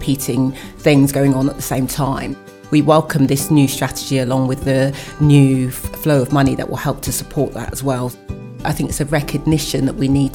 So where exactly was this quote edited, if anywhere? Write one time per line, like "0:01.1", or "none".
0:02.5
0:08.6